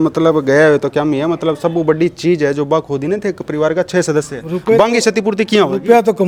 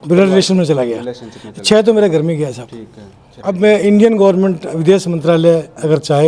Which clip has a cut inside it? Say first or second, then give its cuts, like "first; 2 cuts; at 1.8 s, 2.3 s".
second; 1 cut; at 3.3 s